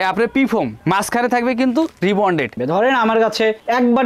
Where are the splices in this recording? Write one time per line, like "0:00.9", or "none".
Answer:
0:02.6